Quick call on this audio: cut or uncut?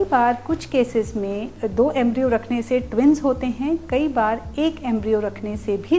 cut